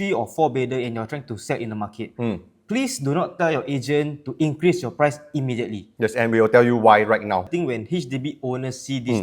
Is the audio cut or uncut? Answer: cut